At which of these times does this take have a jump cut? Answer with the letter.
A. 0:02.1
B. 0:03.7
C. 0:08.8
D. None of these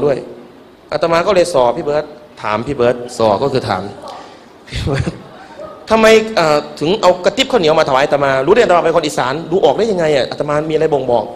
B